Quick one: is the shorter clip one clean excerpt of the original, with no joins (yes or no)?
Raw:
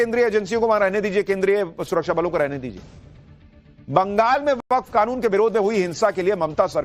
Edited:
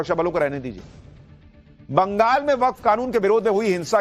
no